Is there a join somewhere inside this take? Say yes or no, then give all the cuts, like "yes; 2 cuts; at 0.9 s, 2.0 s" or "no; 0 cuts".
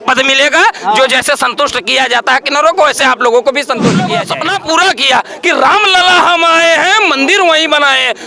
yes; 1 cut; at 4.2 s